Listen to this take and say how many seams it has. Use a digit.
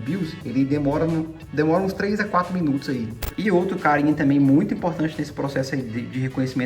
1